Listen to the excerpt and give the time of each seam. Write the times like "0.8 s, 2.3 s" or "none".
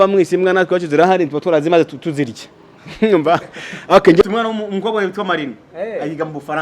4.2 s